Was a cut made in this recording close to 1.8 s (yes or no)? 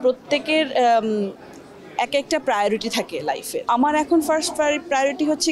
no